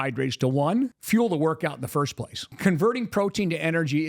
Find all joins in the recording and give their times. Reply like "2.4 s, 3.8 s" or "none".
1.0 s, 2.5 s